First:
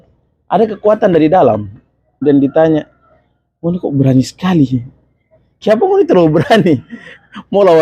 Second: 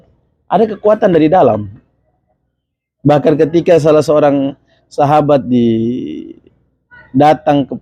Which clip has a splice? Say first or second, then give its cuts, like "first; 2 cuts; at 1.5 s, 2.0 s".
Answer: first; 1 cut; at 2.2 s